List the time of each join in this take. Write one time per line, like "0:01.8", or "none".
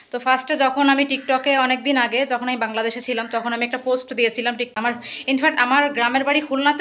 0:05.1